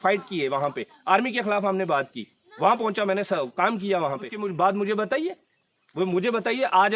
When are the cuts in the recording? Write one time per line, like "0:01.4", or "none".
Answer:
0:04.3